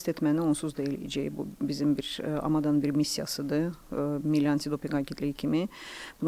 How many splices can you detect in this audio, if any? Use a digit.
0